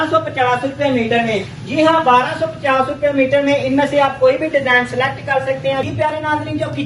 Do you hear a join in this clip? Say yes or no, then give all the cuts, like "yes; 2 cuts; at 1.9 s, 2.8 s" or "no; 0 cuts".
yes; 1 cut; at 5.9 s